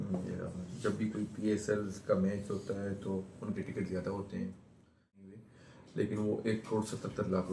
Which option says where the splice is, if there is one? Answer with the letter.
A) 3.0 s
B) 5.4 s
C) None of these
B